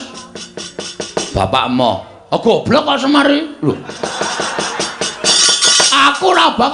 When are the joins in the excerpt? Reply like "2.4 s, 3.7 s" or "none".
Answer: 5.3 s